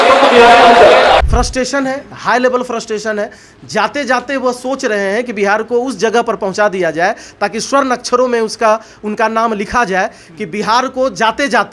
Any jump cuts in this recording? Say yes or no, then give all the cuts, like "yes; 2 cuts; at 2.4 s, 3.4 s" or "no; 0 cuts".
yes; 1 cut; at 1.3 s